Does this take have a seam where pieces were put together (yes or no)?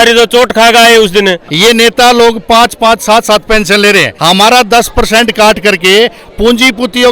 yes